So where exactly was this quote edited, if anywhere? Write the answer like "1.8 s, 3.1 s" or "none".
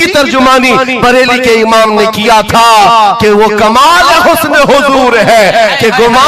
none